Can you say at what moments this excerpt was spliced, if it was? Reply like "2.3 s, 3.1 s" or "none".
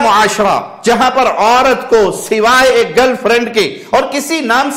none